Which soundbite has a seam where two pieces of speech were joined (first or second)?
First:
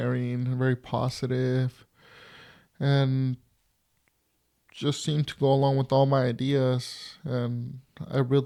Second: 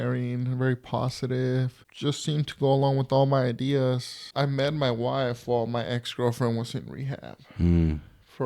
second